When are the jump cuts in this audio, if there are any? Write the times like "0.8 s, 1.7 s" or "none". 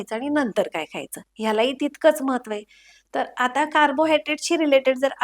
none